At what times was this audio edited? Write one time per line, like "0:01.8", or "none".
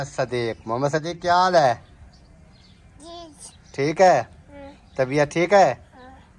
none